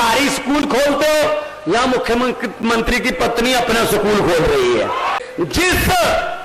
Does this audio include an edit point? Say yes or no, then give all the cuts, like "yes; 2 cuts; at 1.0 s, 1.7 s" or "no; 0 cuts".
yes; 1 cut; at 5.2 s